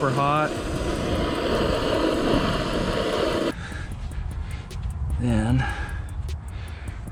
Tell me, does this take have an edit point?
no; 0 cuts

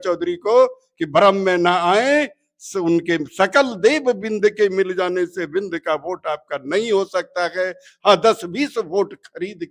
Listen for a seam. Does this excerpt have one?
no; 0 cuts

